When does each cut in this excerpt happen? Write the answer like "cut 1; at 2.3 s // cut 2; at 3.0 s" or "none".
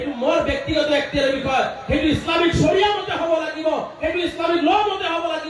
none